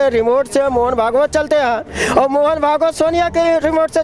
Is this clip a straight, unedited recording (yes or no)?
yes